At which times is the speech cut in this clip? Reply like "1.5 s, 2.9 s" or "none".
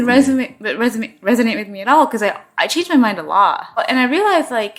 3.8 s